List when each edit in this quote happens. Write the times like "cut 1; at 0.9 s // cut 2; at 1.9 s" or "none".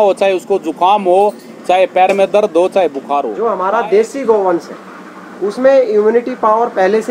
cut 1; at 3.3 s